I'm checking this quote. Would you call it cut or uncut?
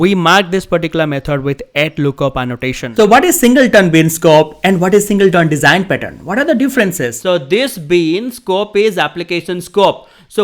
cut